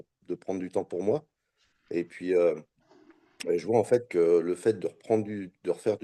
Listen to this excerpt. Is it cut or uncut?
uncut